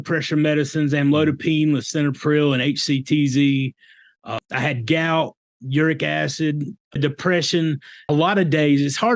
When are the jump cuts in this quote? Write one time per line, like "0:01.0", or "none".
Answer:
0:04.4
0:07.0
0:08.1